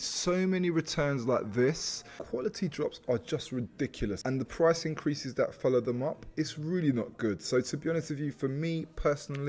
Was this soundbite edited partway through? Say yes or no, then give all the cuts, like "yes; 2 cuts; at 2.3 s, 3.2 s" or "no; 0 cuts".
yes; 2 cuts; at 2.2 s, 4.2 s